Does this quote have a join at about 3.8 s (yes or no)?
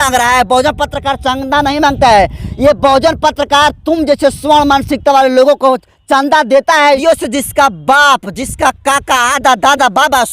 no